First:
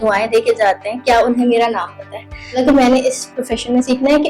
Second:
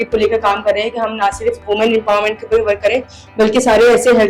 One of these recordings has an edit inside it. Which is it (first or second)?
first